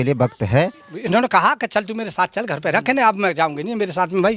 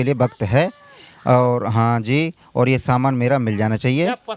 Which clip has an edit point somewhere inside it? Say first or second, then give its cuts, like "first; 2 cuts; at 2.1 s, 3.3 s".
first; 1 cut; at 0.9 s